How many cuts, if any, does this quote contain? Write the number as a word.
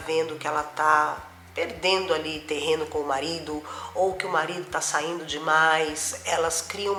zero